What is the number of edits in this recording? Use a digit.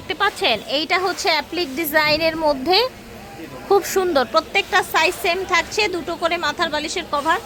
0